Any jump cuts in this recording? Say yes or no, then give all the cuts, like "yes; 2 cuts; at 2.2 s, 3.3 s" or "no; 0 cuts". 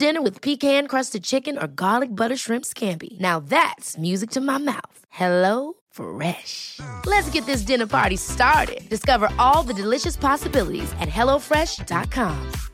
no; 0 cuts